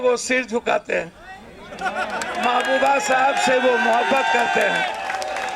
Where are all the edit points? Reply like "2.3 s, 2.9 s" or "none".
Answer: none